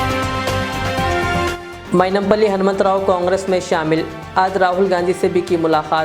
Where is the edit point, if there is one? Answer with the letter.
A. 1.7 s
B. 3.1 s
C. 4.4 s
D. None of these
A